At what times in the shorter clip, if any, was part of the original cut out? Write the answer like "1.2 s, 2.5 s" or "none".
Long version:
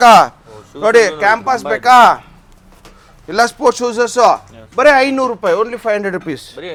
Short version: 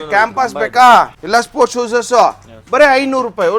1.2 s